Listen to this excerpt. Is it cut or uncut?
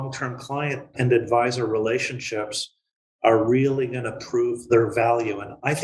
cut